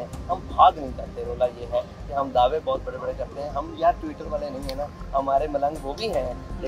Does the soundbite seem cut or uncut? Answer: uncut